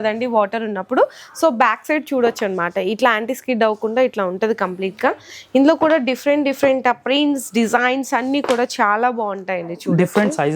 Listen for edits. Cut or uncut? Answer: uncut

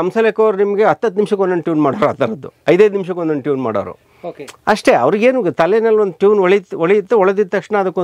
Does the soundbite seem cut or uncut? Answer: uncut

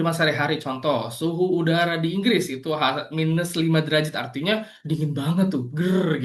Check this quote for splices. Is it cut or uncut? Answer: uncut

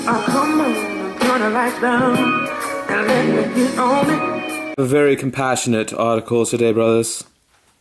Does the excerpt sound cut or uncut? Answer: cut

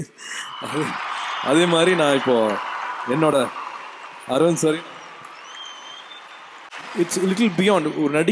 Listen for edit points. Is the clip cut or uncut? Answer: cut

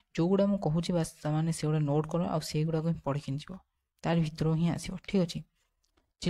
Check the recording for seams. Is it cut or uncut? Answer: uncut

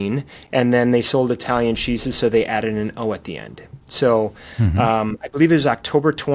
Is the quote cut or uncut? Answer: uncut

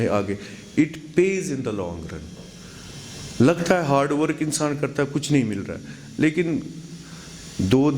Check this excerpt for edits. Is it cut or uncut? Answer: uncut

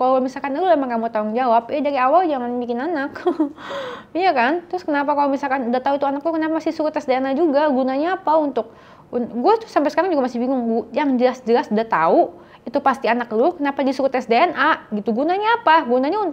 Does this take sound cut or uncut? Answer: uncut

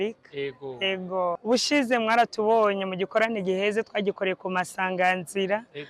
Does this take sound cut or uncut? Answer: cut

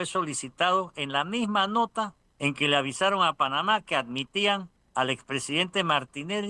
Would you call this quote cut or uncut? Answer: cut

